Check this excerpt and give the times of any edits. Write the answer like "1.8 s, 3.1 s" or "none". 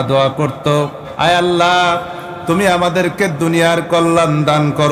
1.0 s